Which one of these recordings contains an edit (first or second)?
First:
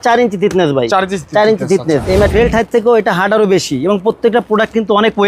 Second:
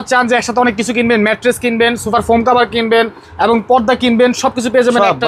first